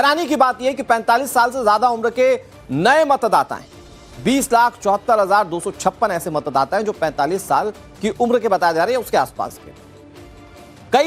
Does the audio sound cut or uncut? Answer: uncut